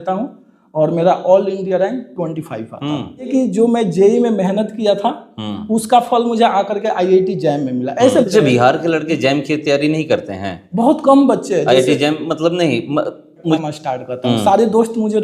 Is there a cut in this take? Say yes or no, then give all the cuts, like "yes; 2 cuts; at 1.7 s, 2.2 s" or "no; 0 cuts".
yes; 3 cuts; at 3.3 s, 8.3 s, 13.6 s